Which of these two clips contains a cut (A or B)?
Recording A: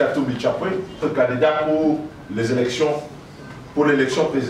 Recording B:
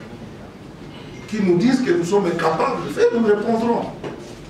A